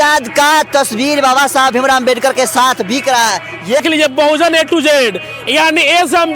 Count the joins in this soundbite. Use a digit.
1